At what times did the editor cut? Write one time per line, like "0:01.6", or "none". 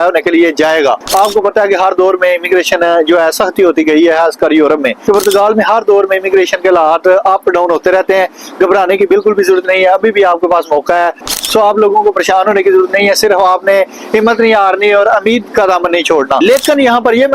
0:01.0
0:04.9
0:11.3
0:16.4